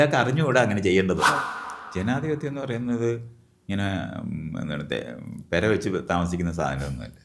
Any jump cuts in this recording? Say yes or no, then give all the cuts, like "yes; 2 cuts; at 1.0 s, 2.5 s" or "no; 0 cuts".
yes; 1 cut; at 1.3 s